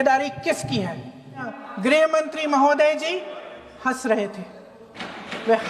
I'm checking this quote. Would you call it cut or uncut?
cut